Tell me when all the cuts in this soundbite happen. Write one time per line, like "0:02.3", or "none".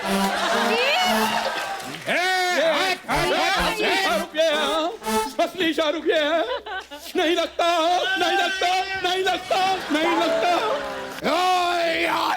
0:11.1